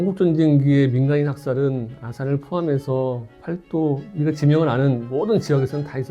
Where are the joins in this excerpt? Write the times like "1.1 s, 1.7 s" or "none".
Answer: 3.4 s